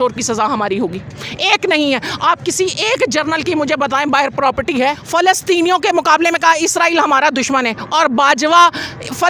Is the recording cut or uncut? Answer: cut